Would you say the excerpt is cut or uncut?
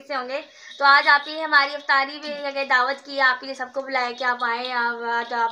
uncut